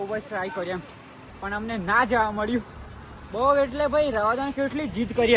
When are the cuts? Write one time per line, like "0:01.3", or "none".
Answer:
none